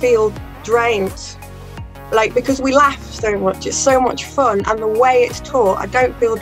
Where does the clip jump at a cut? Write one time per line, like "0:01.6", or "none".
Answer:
none